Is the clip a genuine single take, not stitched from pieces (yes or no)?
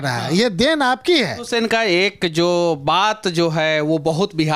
no